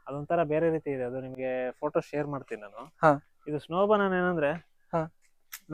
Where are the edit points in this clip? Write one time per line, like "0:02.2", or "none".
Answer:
none

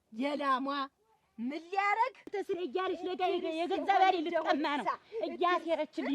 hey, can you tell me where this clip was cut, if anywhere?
0:02.3

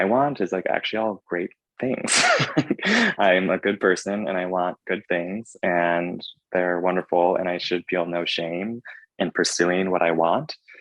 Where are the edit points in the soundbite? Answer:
none

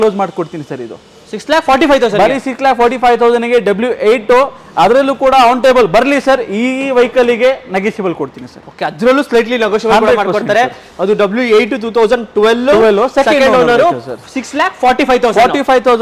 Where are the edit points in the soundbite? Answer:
none

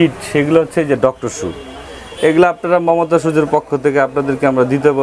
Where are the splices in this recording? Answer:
none

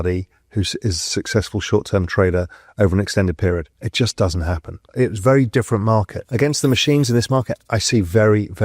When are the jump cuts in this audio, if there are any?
0:03.8
0:04.9
0:06.2

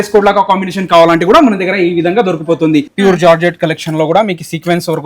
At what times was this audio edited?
0:02.9

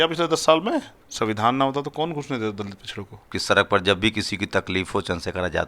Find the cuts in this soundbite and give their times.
0:01.0
0:03.3

